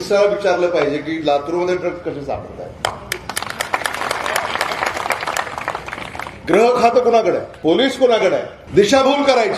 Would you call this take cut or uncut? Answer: cut